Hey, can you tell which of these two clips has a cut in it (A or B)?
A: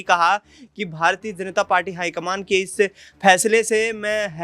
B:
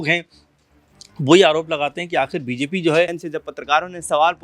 B